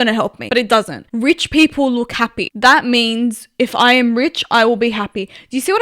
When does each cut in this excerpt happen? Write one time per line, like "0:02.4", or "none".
0:00.8
0:02.4